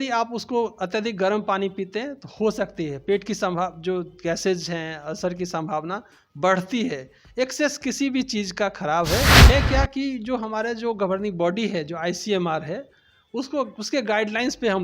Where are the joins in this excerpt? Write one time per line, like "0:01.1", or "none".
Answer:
0:09.4